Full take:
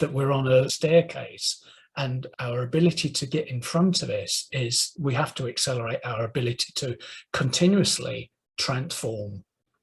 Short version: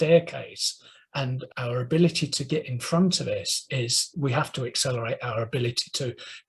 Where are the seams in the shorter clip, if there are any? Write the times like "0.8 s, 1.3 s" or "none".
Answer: none